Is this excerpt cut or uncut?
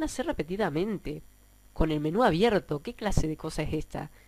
uncut